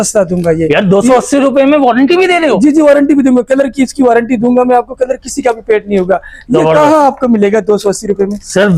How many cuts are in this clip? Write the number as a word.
zero